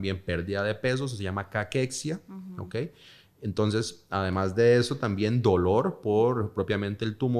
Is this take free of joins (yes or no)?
yes